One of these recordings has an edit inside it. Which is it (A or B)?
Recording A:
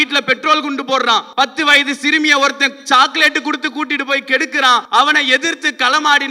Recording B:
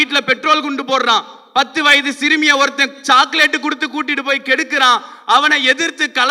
A